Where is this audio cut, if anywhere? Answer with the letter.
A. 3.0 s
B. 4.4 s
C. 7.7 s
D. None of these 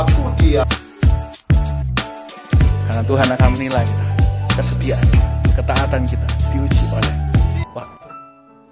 D